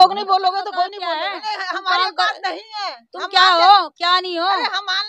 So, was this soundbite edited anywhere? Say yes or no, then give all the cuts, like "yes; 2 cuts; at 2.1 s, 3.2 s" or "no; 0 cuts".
yes; 1 cut; at 0.9 s